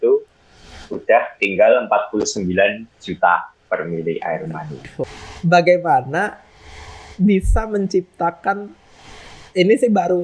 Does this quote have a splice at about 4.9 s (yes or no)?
yes